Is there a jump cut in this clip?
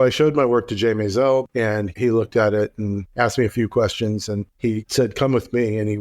yes; 3 cuts; at 1.5 s, 3.0 s, 4.4 s

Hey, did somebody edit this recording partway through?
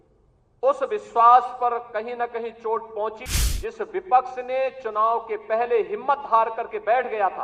yes; 1 cut; at 3.2 s

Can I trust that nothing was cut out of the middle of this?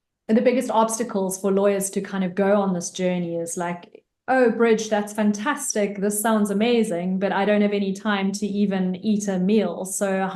yes; 0 cuts

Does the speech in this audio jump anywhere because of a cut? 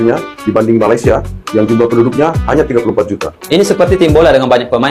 no; 0 cuts

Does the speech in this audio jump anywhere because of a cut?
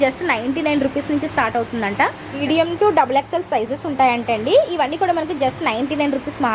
yes; 1 cut; at 2.4 s

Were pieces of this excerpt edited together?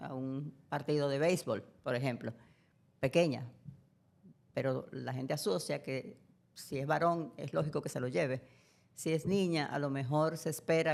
no; 0 cuts

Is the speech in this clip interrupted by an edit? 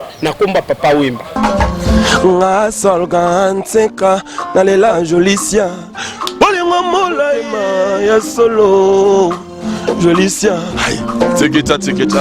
yes; 1 cut; at 1.2 s

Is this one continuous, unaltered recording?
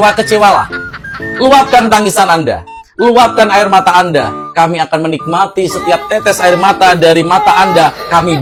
yes; 0 cuts

